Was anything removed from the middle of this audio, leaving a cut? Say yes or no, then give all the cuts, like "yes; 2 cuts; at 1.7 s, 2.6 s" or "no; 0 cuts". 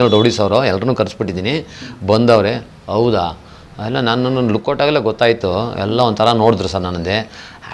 no; 0 cuts